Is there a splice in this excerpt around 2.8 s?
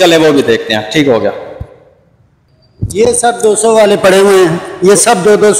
no; 0 cuts

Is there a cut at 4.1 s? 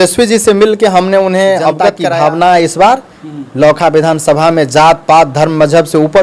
no; 1 cut; at 2.0 s

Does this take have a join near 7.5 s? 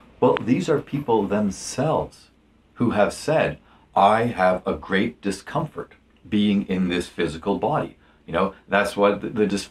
yes; 1 cut; at 7.5 s

